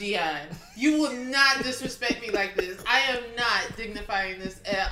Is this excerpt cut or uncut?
uncut